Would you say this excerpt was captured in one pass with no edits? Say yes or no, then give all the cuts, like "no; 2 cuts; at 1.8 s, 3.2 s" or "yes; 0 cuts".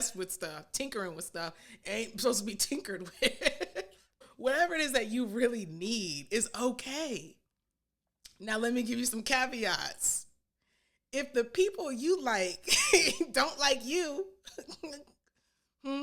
yes; 0 cuts